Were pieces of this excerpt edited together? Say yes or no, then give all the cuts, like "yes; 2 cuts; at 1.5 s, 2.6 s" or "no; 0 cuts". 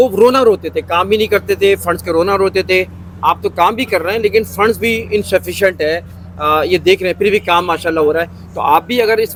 no; 0 cuts